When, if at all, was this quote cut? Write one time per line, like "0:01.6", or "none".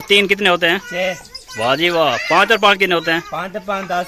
none